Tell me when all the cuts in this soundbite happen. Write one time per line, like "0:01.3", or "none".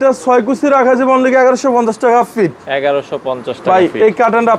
none